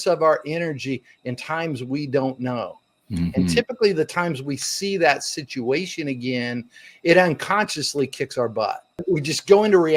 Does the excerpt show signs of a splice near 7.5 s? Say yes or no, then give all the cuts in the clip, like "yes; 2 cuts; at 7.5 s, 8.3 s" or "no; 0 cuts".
no; 1 cut; at 9.0 s